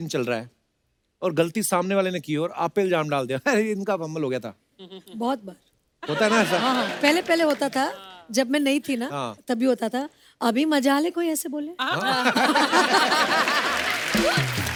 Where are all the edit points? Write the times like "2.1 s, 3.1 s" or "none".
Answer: none